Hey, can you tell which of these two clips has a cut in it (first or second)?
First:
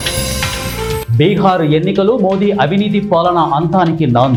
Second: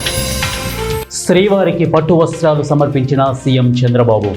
second